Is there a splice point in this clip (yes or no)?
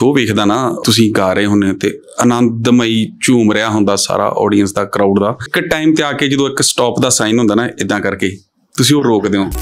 yes